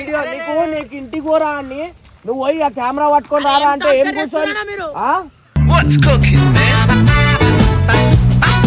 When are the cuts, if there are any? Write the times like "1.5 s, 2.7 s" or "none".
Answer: none